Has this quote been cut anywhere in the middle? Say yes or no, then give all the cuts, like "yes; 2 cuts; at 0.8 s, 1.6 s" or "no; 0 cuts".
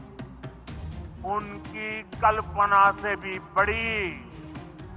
no; 0 cuts